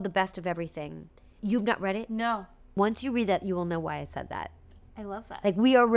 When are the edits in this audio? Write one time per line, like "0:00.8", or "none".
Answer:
0:01.3
0:02.7